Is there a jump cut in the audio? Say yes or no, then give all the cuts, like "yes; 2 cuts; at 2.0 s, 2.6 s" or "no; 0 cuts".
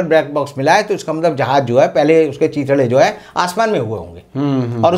no; 0 cuts